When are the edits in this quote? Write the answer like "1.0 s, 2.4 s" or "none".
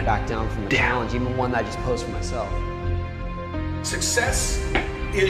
none